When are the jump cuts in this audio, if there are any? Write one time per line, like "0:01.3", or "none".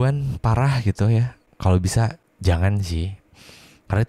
0:01.4
0:02.3